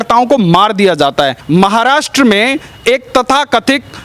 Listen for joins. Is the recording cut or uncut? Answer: cut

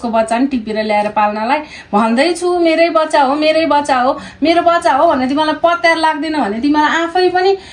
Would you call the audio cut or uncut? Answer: uncut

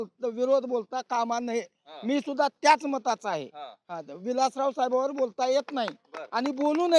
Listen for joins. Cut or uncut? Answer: uncut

